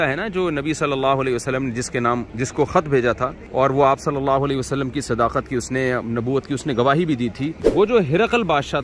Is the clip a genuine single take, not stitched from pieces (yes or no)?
no